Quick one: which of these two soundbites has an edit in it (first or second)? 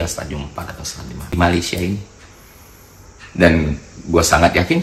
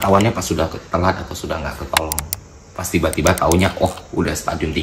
first